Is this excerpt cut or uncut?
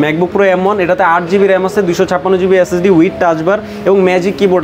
uncut